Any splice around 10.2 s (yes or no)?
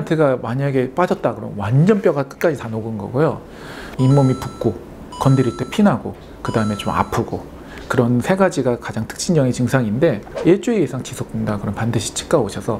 yes